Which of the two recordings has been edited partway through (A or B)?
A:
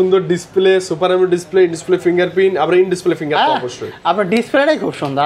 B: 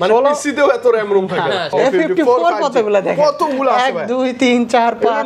B